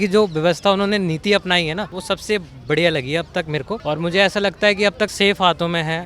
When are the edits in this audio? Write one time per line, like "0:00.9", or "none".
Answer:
0:01.9
0:03.8
0:05.1